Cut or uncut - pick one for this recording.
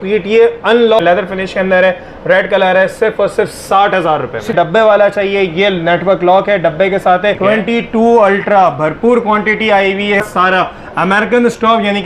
cut